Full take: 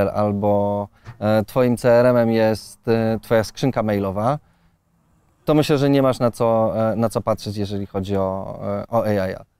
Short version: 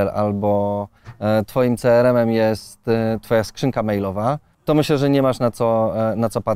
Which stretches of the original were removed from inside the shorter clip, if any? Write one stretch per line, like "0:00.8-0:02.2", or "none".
0:04.5-0:05.3